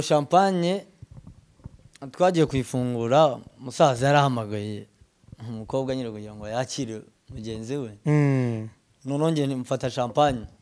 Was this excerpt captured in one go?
yes; 0 cuts

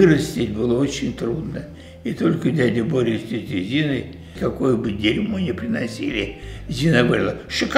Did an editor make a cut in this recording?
no; 0 cuts

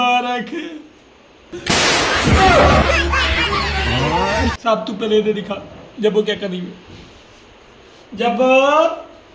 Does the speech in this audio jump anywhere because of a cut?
no; 0 cuts

